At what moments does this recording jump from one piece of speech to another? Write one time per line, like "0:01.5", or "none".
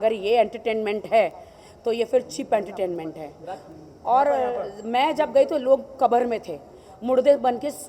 none